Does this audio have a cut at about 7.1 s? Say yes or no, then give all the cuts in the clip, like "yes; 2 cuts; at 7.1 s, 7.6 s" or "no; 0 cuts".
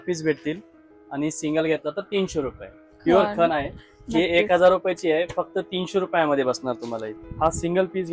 yes; 2 cuts; at 2.9 s, 7.1 s